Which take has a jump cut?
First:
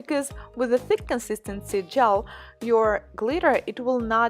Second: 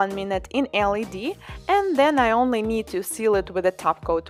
first; 1 cut; at 2.4 s

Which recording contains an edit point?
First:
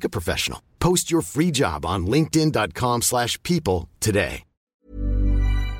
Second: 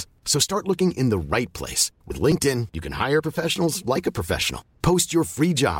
first; 1 cut; at 4.8 s

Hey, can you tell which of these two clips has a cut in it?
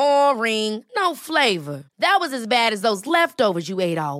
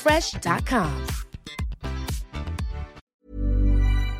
second; 1 cut; at 3.0 s

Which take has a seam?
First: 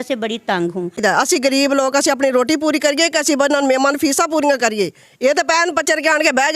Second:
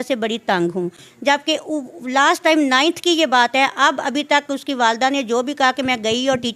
first; 1 cut; at 1.0 s

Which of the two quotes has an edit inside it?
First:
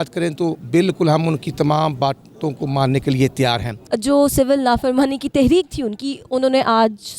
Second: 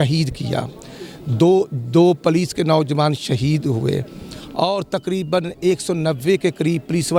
first; 1 cut; at 3.7 s

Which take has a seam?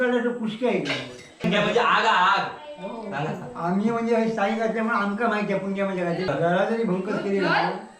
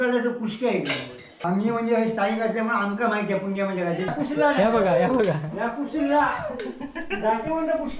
first; 2 cuts; at 1.4 s, 6.3 s

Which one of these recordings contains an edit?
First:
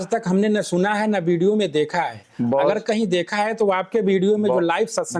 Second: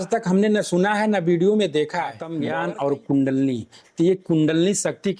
second; 1 cut; at 2.3 s

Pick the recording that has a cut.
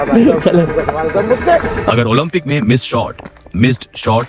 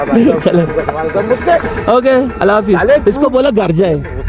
first; 1 cut; at 1.9 s

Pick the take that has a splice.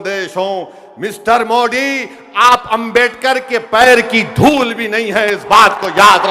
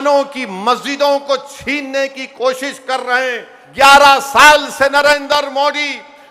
second; 1 cut; at 3.6 s

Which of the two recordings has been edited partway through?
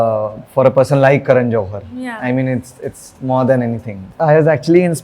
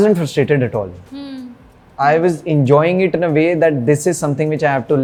first; 1 cut; at 4.1 s

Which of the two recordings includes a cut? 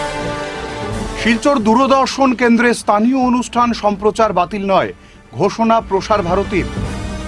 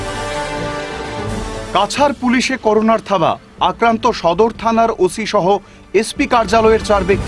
first; 1 cut; at 0.9 s

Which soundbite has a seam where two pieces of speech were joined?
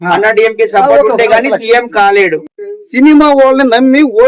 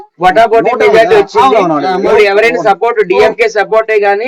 first; 1 cut; at 2.5 s

